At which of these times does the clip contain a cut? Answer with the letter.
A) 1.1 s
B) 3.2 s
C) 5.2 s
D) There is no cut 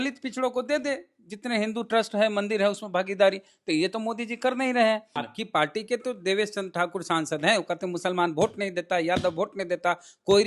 C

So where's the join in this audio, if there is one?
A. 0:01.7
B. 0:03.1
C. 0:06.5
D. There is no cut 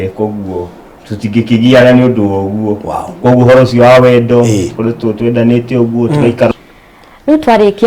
C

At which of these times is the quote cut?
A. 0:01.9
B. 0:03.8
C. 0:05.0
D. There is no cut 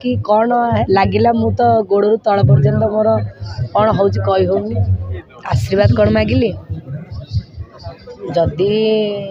C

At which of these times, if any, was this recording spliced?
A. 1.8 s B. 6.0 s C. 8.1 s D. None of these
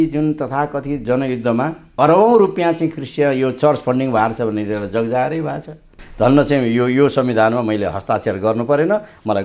B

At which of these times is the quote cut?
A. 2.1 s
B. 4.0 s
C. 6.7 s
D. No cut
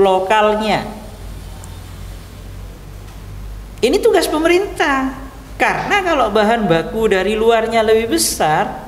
D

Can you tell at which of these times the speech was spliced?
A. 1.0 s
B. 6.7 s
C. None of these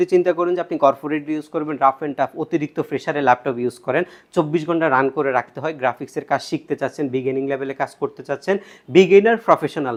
C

